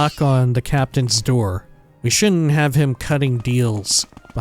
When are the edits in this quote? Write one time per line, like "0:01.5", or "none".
0:01.8